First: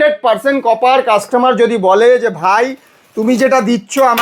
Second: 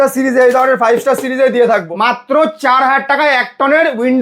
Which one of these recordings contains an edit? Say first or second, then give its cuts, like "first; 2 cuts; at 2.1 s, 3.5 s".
second; 1 cut; at 1.9 s